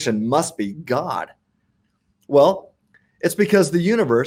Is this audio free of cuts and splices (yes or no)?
yes